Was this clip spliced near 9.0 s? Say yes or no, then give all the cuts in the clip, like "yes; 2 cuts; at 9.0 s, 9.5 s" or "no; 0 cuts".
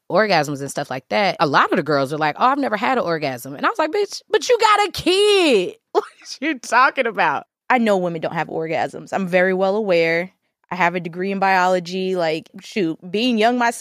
no; 3 cuts; at 1.4 s, 7.5 s, 12.5 s